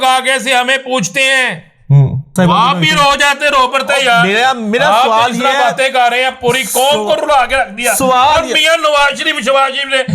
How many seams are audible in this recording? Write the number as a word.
one